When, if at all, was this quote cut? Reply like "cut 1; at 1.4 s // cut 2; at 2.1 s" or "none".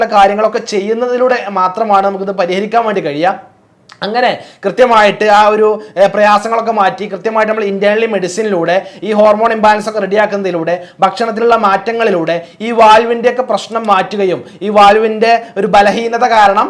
none

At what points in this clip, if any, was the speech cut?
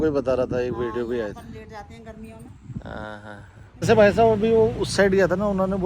cut 1; at 3.8 s

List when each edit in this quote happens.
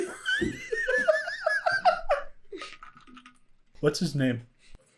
cut 1; at 3.8 s

